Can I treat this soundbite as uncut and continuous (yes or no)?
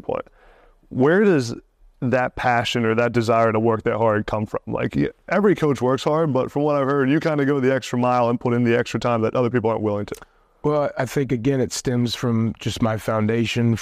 yes